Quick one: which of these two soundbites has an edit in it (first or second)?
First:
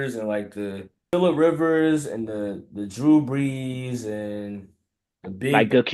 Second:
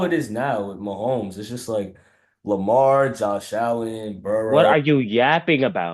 first